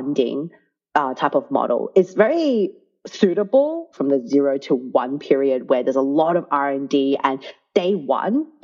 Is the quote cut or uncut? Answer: cut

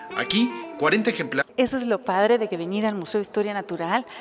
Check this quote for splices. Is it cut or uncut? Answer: uncut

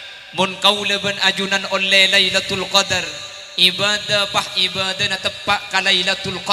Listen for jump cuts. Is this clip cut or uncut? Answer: uncut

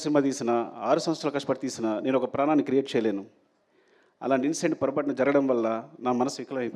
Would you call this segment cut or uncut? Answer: uncut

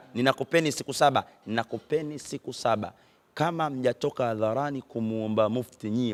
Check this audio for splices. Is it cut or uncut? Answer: uncut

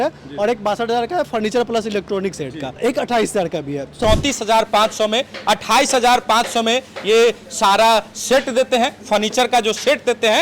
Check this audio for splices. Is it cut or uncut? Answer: cut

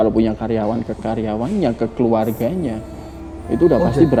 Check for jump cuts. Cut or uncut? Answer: uncut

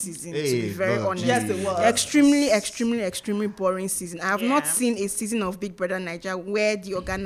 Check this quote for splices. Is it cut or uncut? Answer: uncut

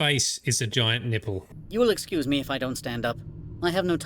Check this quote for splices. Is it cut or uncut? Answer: cut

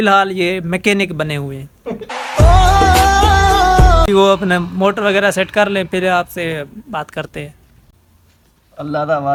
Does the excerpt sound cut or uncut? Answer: uncut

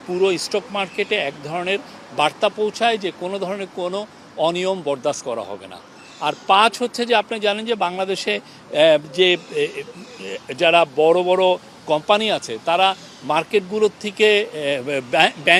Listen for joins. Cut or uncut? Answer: uncut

